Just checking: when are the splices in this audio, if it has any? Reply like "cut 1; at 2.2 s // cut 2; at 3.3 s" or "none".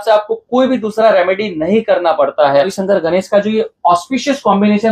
cut 1; at 2.8 s